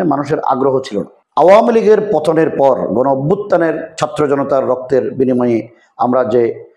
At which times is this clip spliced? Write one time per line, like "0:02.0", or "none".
0:01.2